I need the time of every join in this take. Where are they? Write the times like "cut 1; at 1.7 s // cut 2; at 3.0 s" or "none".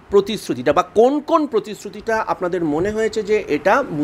none